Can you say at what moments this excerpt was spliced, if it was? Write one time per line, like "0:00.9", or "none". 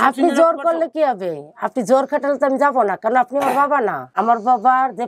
0:04.1